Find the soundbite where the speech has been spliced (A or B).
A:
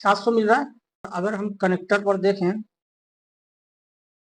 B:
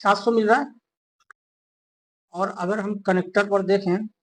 A